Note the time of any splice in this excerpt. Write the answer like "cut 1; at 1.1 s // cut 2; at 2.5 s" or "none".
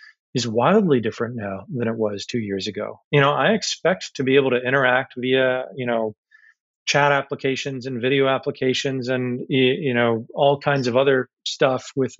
cut 1; at 2.9 s

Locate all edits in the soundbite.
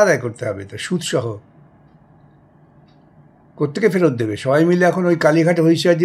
none

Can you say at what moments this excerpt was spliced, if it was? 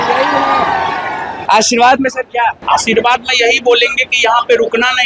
cut 1; at 1.3 s // cut 2; at 2.6 s

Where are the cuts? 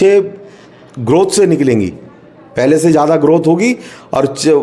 none

